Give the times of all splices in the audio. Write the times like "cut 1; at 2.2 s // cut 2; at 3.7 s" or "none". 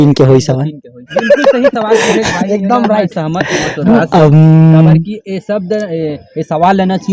none

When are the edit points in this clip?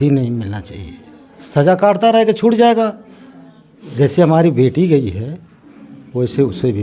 none

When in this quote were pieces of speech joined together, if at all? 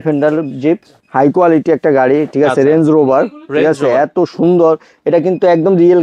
cut 1; at 0.9 s

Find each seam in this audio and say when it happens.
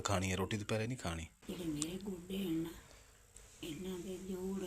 cut 1; at 1.3 s

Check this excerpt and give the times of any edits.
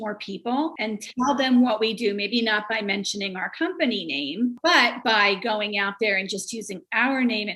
cut 1; at 0.8 s // cut 2; at 4.6 s

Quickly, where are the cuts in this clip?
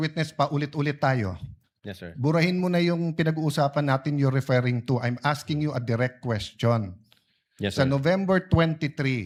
none

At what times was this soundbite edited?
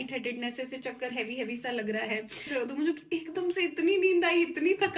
cut 1; at 2.5 s

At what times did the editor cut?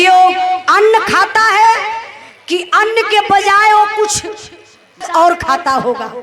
cut 1; at 5.1 s

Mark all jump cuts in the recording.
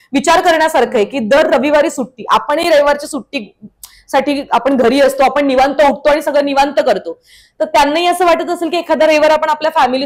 none

